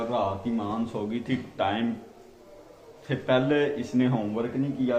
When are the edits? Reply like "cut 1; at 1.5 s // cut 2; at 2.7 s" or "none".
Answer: none